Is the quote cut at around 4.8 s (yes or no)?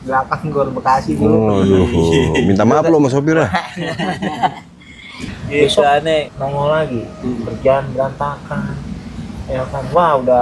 no